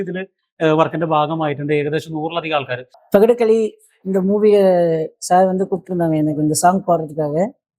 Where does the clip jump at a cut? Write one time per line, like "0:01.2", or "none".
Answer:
0:02.9

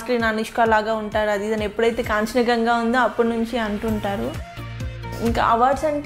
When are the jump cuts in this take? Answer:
0:05.0

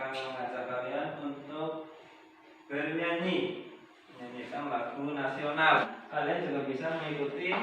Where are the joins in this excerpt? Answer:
0:05.8

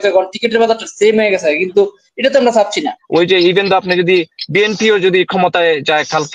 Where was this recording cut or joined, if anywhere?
0:03.0

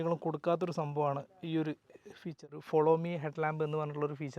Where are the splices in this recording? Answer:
0:02.5

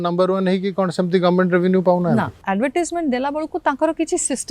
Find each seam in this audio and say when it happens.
0:02.4

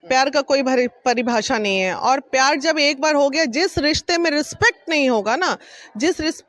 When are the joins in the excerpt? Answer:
none

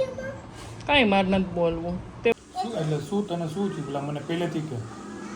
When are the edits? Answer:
0:02.3

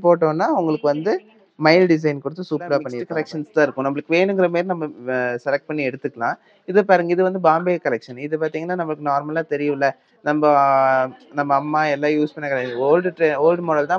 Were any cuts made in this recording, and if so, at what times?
0:03.0

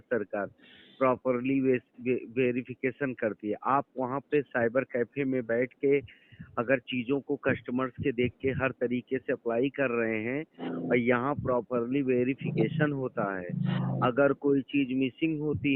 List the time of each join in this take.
none

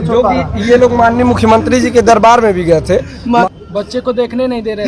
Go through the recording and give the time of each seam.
0:03.4

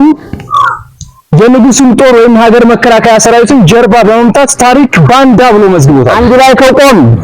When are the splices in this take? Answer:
0:06.1

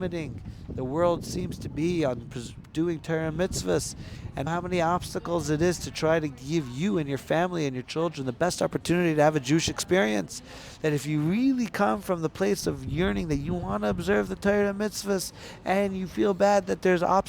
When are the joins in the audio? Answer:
0:04.5

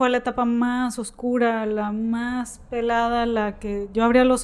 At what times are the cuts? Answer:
none

